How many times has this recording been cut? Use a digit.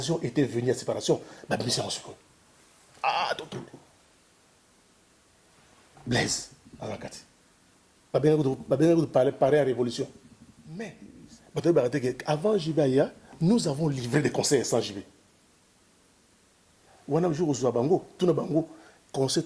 1